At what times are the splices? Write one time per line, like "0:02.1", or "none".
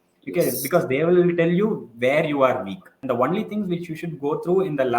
0:02.9